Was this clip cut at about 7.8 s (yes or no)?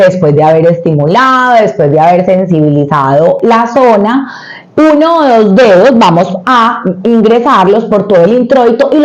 no